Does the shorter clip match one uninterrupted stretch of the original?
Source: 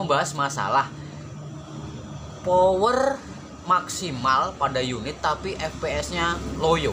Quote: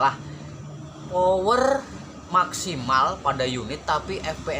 no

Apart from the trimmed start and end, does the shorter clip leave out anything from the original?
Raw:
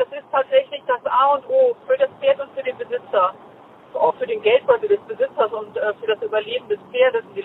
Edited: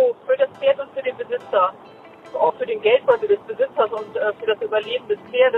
no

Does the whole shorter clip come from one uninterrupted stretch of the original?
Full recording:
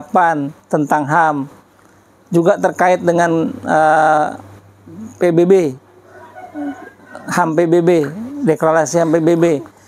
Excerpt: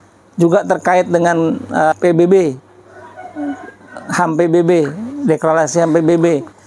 no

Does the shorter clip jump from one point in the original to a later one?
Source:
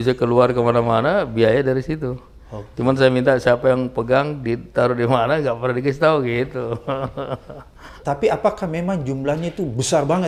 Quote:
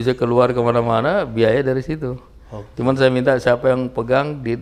no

